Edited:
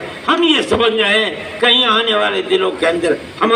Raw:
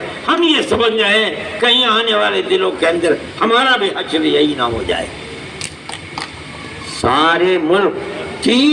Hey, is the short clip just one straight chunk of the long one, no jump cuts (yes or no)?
yes